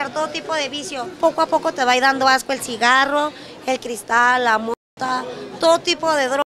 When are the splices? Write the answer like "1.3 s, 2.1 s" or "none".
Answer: 1.2 s